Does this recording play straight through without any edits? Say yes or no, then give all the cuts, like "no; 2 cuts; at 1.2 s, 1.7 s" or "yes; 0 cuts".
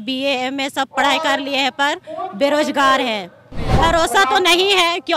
no; 1 cut; at 3.7 s